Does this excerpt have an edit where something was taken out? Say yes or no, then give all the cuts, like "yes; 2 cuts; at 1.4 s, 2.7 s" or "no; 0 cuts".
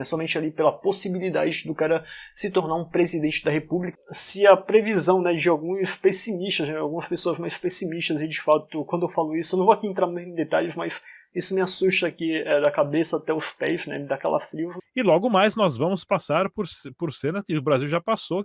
yes; 2 cuts; at 3.9 s, 14.8 s